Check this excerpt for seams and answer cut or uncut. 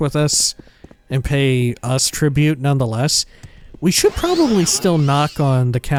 uncut